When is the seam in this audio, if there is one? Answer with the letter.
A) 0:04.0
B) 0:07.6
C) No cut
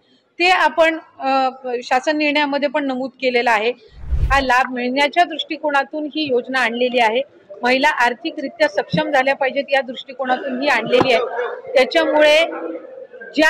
A